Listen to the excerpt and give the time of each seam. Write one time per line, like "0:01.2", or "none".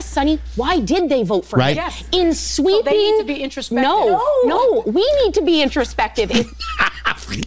none